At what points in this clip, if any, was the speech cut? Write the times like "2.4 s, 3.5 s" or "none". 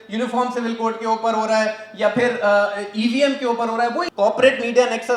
4.1 s